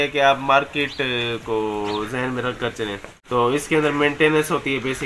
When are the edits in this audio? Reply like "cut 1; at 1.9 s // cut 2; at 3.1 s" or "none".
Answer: cut 1; at 3.2 s